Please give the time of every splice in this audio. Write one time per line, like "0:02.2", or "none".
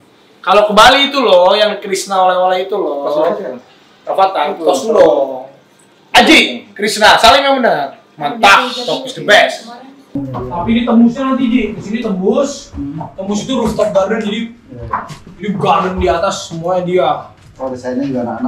0:09.7